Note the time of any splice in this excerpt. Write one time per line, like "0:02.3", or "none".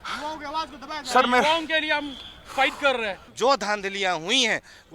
0:03.2